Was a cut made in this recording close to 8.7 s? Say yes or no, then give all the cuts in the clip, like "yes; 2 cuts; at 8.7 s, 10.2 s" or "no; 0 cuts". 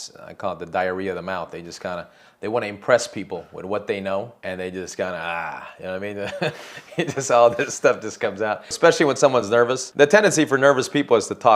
yes; 3 cuts; at 4.3 s, 8.7 s, 9.8 s